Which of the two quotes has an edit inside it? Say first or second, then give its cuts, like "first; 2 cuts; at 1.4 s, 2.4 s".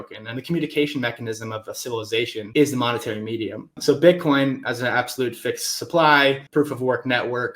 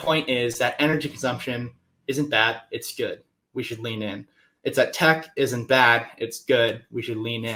first; 3 cuts; at 2.5 s, 3.8 s, 6.4 s